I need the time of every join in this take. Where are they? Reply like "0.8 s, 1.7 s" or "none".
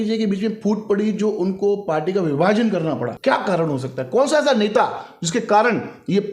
3.2 s